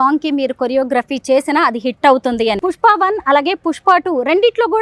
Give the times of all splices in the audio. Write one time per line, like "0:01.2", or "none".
0:02.6